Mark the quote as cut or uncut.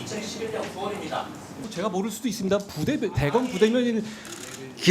cut